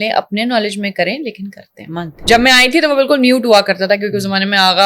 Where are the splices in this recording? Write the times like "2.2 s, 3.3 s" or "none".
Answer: 2.2 s